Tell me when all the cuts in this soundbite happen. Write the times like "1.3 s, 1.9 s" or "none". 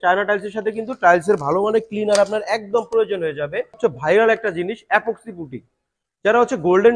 3.8 s